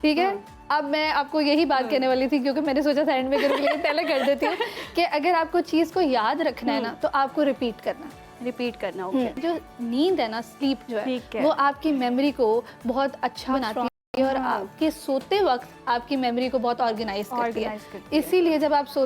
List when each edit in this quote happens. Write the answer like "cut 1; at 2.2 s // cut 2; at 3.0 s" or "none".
cut 1; at 9.4 s